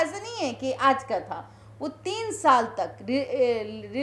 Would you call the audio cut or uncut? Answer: uncut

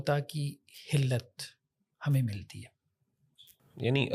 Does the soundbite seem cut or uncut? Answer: uncut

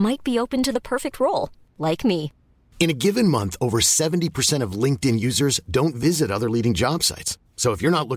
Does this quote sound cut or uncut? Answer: uncut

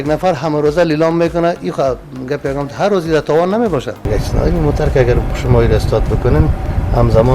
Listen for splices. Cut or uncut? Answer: cut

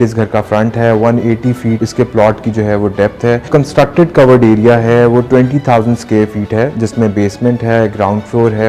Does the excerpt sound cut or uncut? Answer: cut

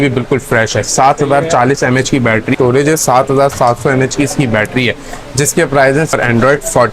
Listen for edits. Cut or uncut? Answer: cut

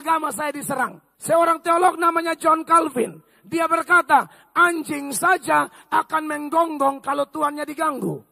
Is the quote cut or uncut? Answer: cut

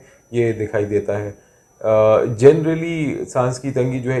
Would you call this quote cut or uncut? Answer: uncut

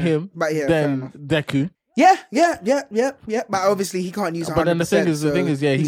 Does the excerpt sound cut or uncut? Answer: cut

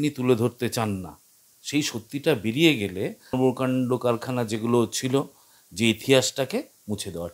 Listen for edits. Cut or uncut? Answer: cut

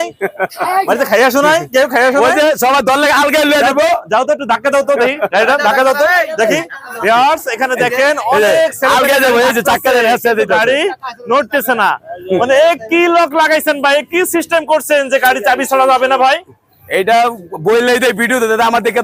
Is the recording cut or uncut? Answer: uncut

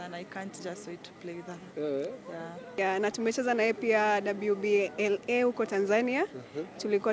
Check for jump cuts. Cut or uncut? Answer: cut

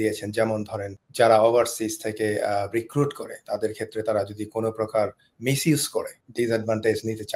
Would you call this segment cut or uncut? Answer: cut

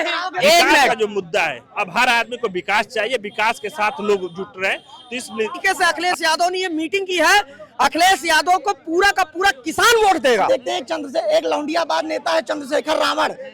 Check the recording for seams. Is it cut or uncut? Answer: cut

